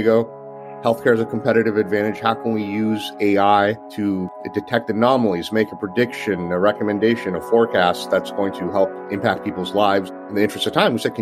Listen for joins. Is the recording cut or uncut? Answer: cut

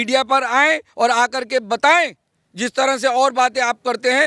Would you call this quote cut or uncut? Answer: uncut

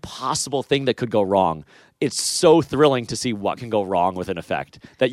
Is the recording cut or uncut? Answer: uncut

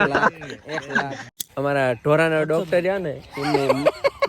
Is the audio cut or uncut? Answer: cut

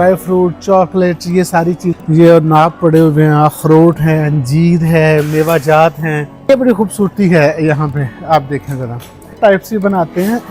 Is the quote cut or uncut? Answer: cut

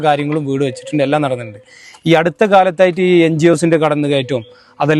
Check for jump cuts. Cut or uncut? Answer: uncut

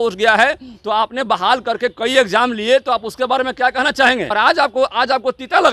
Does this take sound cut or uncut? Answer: cut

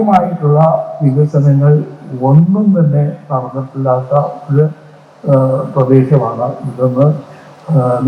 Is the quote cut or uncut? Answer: uncut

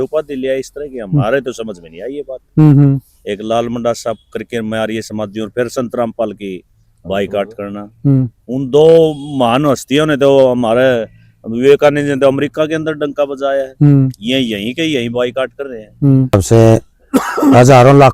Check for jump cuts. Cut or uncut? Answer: cut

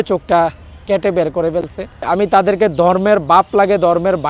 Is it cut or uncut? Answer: cut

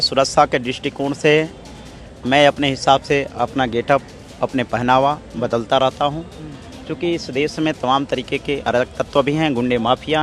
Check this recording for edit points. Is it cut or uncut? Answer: uncut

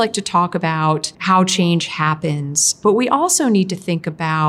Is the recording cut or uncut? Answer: cut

